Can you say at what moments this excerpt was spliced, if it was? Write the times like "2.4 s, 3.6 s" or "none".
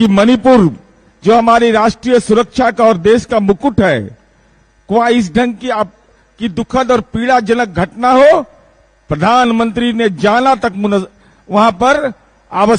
none